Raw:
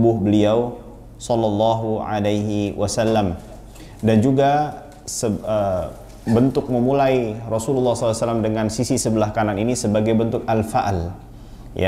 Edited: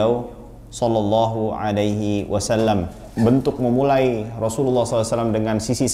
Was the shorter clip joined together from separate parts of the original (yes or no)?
yes